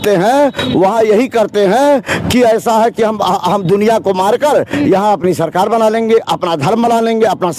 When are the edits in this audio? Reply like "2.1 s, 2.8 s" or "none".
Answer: none

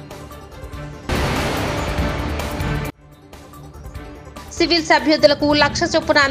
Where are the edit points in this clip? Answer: 1.1 s, 4.4 s

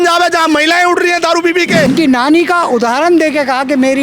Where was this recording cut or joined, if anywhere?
1.9 s

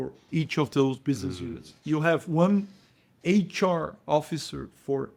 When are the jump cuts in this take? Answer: none

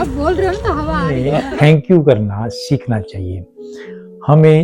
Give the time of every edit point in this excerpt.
1.2 s

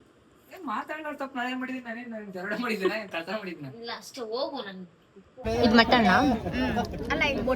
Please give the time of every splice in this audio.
5.4 s

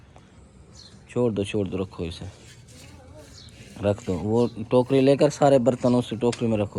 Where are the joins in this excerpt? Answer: none

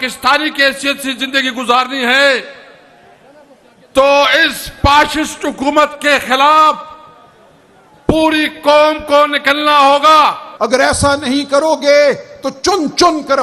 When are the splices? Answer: 10.5 s

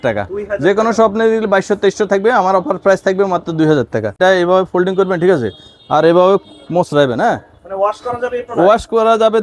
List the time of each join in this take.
4.2 s

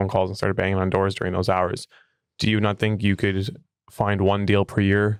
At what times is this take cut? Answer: none

